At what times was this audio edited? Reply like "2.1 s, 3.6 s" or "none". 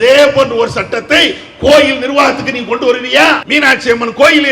3.4 s